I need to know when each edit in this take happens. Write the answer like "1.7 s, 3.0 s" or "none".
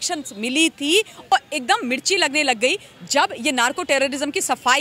1.3 s